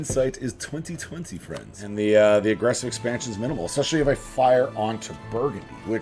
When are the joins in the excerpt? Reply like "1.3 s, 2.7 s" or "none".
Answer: 1.8 s